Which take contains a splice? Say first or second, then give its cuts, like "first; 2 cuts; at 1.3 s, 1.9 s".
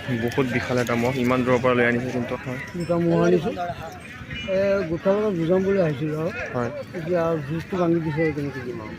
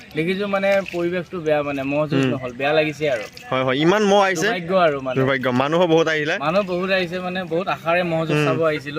first; 1 cut; at 2.3 s